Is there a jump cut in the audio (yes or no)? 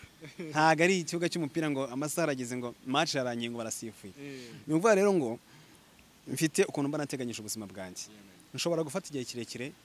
no